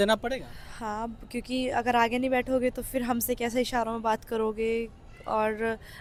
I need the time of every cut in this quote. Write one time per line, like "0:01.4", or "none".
none

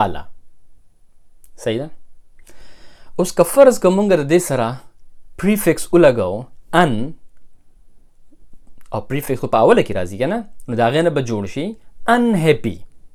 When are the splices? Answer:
none

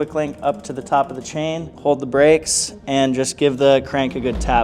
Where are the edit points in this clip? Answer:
0:01.7

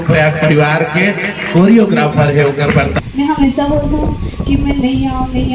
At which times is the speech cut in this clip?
0:02.9

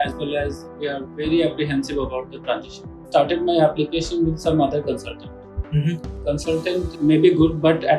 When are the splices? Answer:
0:03.1
0:06.6

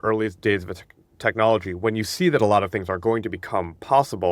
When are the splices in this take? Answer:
none

